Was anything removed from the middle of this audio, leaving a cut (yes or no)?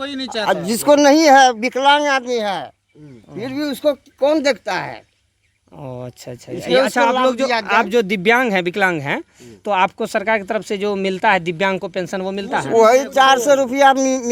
no